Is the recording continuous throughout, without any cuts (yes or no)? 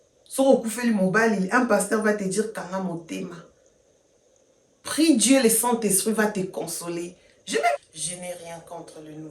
no